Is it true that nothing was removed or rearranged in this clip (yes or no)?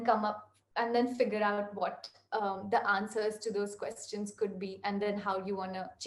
yes